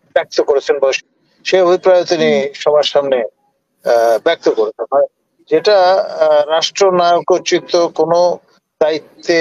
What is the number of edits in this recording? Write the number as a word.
one